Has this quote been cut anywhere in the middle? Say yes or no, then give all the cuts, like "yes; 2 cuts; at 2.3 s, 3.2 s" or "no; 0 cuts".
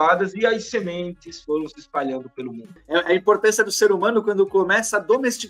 yes; 1 cut; at 2.8 s